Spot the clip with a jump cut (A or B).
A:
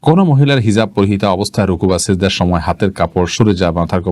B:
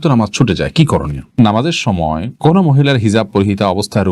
B